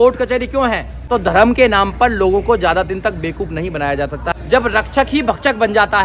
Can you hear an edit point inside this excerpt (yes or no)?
yes